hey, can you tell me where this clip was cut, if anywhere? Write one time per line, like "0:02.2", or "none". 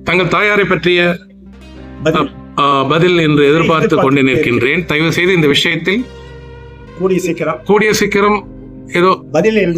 none